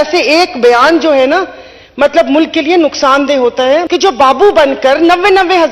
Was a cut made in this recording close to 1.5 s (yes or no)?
no